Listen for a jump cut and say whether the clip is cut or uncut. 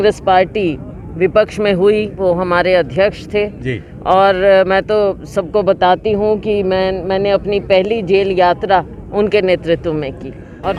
uncut